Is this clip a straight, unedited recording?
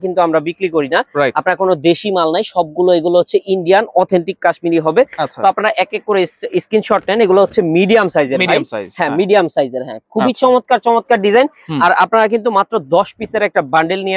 yes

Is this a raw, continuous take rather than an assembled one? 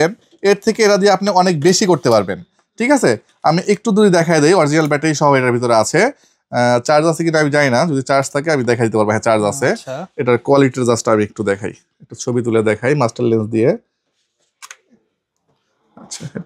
yes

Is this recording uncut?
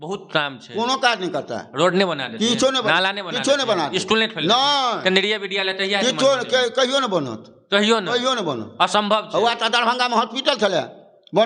yes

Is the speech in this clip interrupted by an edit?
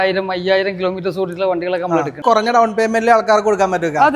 yes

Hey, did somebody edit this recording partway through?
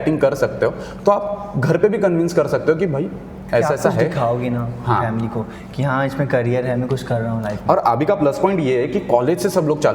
no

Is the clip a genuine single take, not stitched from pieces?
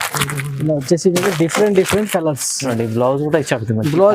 no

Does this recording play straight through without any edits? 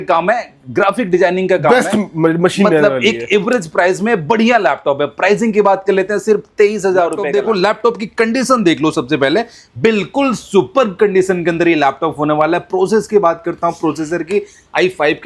no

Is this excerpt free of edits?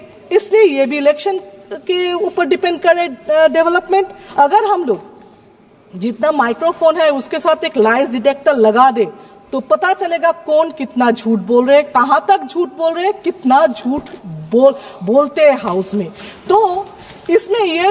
no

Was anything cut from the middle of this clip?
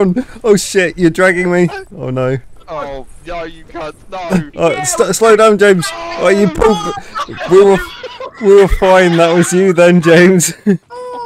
no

